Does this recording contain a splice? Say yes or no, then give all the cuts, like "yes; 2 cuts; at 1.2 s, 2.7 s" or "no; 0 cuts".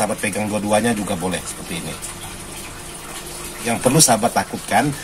yes; 1 cut; at 3.7 s